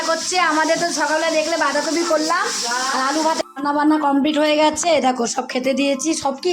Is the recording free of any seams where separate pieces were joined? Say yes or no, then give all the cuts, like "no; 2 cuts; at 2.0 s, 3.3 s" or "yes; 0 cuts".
no; 1 cut; at 3.4 s